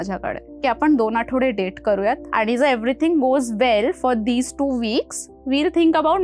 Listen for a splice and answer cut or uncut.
cut